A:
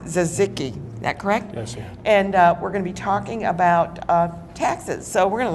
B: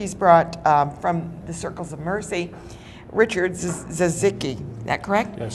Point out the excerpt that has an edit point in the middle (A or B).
B